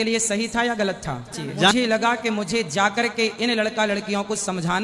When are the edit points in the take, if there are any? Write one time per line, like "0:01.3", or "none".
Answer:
0:01.7